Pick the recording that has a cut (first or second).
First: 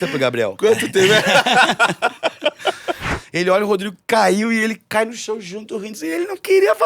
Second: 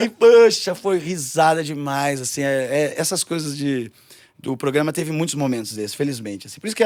first